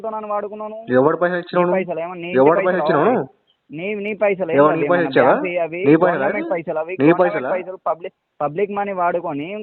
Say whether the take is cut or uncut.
uncut